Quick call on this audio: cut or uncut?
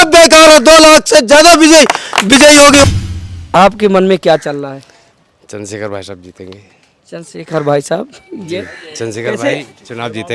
cut